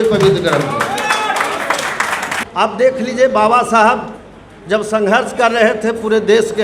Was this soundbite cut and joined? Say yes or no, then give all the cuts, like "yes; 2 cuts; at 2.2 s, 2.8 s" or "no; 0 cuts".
yes; 1 cut; at 2.4 s